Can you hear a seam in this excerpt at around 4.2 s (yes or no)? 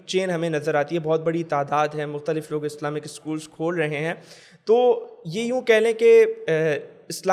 no